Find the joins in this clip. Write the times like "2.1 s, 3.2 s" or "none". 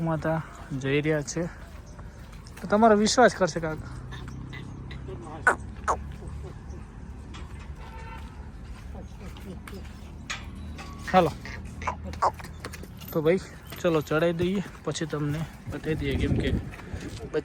none